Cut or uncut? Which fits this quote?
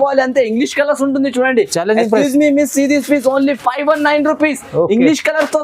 uncut